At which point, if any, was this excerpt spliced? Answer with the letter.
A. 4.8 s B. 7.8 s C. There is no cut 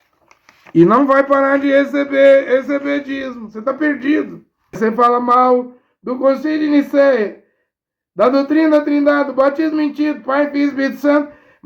A